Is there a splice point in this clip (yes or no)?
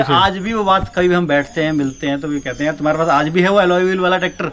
no